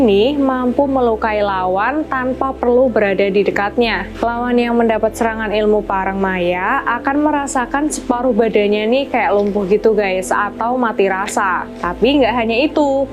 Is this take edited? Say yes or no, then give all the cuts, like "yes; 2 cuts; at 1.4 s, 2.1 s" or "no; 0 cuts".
no; 0 cuts